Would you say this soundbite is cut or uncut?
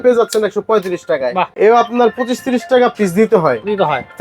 cut